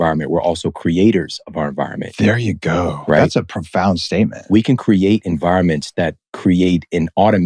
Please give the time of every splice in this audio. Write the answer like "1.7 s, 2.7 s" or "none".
none